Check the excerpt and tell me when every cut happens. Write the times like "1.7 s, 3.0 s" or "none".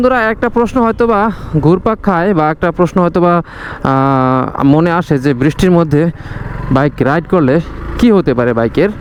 none

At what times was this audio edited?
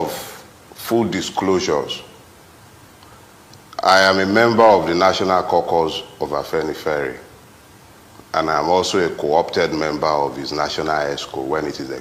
none

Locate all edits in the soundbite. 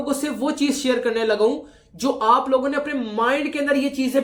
none

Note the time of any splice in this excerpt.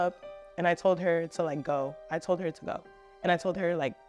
none

